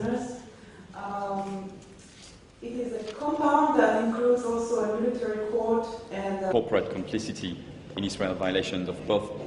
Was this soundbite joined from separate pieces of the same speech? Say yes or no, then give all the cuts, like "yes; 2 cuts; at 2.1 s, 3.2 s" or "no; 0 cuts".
no; 0 cuts